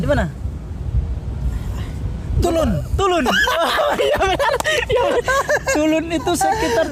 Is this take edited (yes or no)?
no